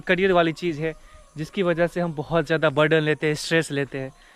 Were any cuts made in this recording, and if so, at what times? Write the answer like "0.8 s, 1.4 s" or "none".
none